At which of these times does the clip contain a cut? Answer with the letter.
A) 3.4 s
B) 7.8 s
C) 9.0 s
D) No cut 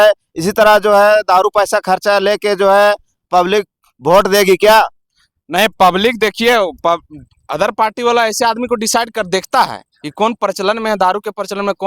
D